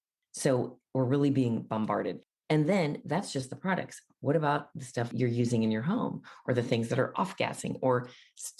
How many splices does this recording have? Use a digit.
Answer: 1